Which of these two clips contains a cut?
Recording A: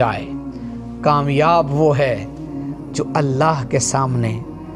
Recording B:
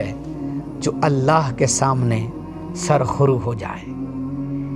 B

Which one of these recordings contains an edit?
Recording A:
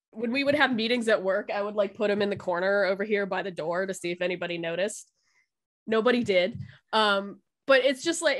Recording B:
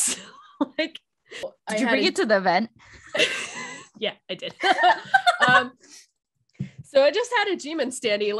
B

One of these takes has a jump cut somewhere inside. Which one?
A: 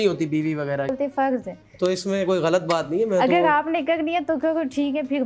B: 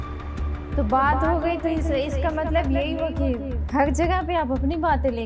A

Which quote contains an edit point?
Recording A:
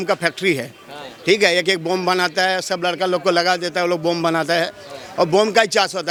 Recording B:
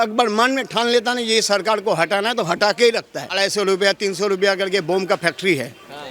B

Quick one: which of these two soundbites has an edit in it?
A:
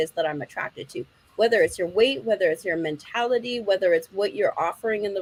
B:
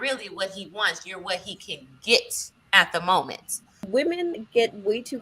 B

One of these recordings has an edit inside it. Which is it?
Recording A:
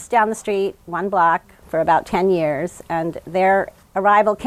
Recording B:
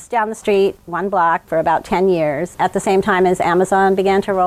B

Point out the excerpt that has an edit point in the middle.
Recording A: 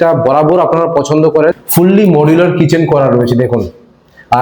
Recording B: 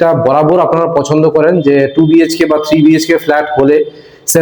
A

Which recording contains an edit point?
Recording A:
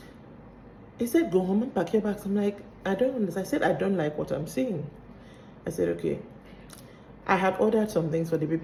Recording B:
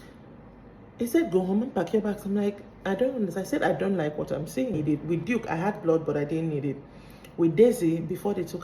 B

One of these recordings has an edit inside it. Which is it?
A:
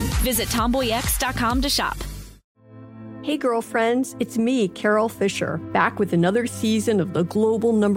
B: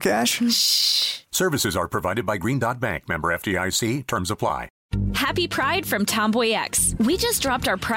B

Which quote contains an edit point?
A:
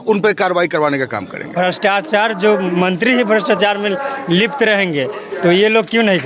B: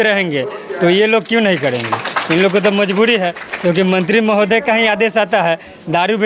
A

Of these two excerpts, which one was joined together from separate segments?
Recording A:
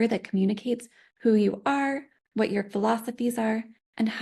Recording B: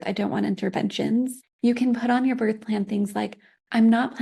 B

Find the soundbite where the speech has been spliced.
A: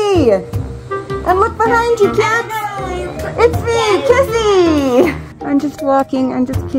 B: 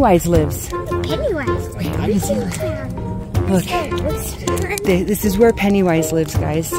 A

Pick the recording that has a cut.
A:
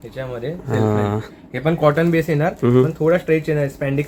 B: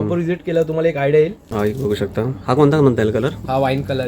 B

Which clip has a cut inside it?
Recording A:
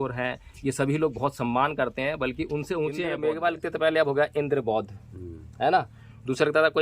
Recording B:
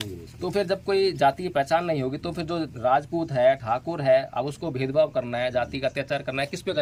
A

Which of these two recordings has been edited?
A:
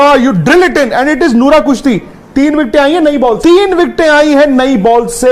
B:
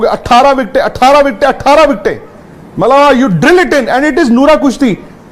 A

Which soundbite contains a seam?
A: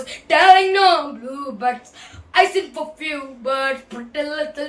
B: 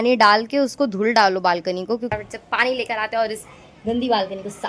B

